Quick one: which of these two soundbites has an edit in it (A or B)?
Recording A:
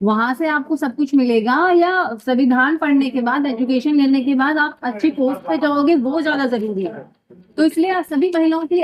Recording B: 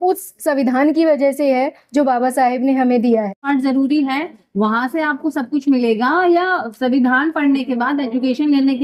B